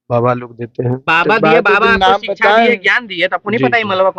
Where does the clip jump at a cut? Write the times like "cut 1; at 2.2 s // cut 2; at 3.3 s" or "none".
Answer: none

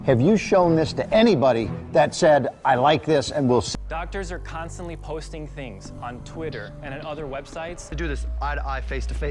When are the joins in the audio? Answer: cut 1; at 3.7 s

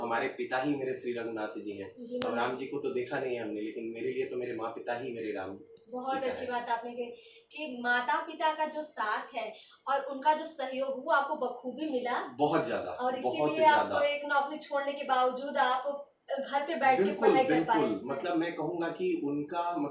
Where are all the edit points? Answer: none

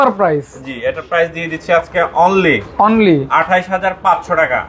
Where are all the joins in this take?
none

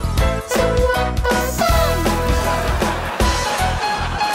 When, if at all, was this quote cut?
none

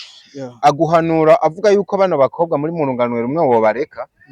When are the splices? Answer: none

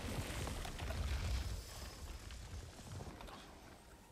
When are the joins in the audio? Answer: cut 1; at 3.1 s

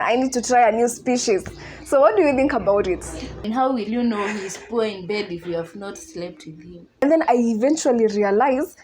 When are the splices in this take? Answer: cut 1; at 3.3 s // cut 2; at 7.0 s

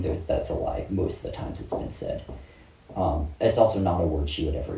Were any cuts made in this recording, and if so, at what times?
none

